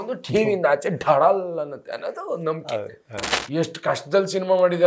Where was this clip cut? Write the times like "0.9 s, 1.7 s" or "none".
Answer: 3.3 s